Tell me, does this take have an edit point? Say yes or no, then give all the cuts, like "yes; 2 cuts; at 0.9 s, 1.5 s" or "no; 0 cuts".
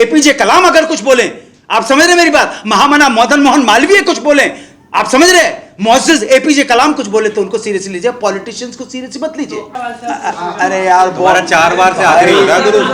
yes; 1 cut; at 9.7 s